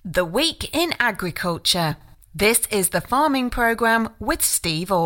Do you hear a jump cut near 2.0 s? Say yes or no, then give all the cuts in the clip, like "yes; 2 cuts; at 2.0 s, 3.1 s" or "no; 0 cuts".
no; 0 cuts